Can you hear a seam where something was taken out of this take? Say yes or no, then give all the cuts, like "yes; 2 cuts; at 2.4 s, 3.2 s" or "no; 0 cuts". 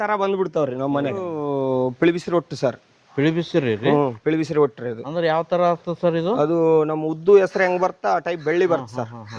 yes; 1 cut; at 1.4 s